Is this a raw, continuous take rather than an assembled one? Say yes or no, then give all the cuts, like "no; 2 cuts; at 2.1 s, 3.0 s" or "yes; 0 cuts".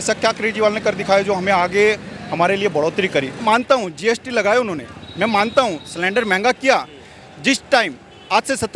no; 1 cut; at 3.4 s